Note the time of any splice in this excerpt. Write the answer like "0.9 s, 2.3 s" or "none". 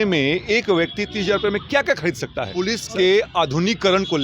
2.4 s